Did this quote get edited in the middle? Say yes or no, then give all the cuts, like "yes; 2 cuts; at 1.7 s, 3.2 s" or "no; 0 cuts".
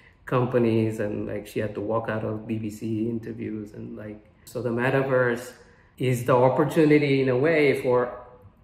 yes; 1 cut; at 4.4 s